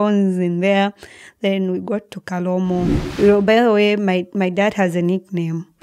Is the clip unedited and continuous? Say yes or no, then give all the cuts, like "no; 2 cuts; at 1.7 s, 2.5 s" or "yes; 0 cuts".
no; 1 cut; at 3.0 s